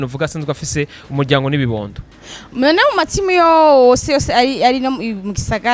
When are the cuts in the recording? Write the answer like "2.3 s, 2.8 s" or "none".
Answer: none